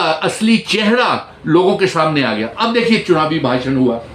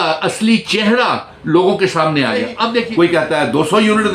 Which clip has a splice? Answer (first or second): second